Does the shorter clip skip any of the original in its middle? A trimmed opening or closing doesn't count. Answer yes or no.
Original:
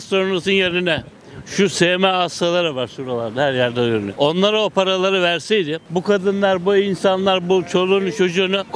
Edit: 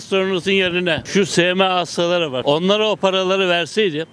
yes